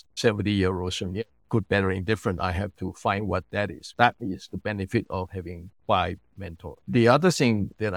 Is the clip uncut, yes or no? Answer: no